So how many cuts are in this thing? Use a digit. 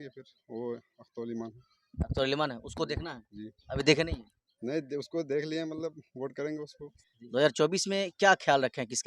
1